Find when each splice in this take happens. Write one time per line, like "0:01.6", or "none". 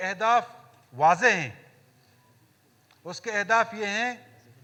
none